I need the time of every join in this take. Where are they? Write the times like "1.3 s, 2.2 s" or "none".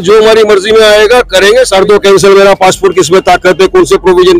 1.7 s